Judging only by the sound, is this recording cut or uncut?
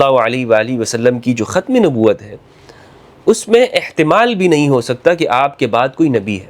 uncut